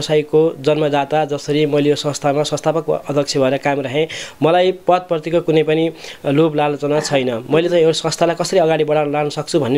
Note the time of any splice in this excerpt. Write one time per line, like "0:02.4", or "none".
none